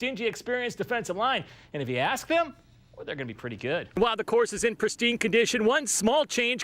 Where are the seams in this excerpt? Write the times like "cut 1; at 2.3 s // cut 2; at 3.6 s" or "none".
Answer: cut 1; at 3.9 s